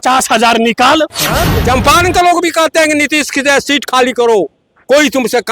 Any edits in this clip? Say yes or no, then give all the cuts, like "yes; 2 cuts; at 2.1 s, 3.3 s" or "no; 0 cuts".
yes; 1 cut; at 1.5 s